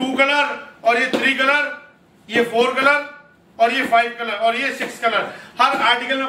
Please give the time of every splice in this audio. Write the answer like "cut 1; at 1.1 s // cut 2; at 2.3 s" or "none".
none